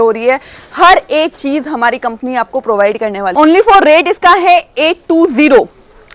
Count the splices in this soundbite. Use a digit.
1